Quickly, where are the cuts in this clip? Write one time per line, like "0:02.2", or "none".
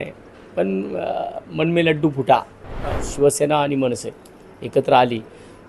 0:02.9